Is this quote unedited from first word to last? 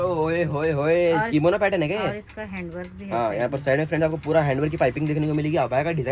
yes; 0 cuts

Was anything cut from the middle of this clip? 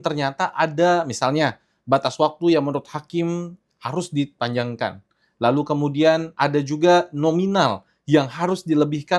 no; 0 cuts

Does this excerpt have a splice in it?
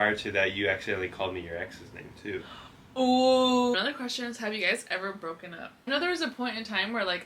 yes; 2 cuts; at 3.7 s, 5.9 s

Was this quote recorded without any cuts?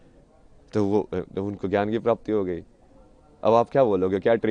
yes; 0 cuts

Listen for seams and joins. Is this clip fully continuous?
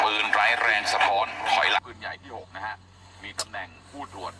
no; 1 cut; at 1.8 s

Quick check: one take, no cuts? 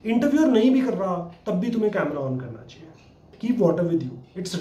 no; 1 cut; at 3.3 s

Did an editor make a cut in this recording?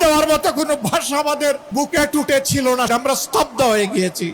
yes; 2 cuts; at 1.6 s, 2.9 s

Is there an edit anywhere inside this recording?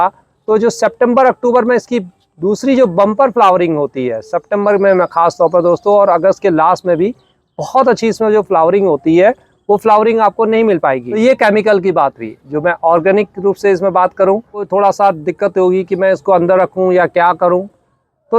yes; 2 cuts; at 11.1 s, 14.6 s

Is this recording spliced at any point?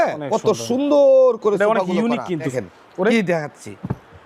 yes; 1 cut; at 2.6 s

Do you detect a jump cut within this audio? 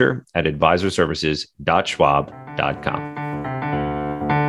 yes; 1 cut; at 3.0 s

